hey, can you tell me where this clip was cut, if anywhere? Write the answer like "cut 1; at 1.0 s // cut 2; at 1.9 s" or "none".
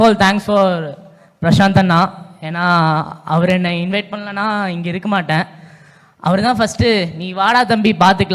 none